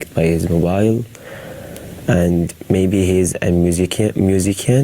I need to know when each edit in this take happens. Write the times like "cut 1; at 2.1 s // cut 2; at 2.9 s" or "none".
cut 1; at 0.9 s